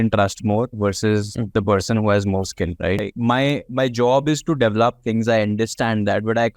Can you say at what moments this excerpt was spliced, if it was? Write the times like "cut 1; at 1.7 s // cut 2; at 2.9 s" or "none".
cut 1; at 3.0 s